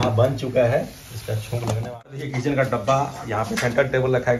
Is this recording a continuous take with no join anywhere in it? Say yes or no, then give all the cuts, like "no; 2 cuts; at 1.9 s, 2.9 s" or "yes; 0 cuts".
no; 1 cut; at 2.0 s